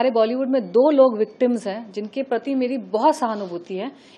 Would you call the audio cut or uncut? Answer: uncut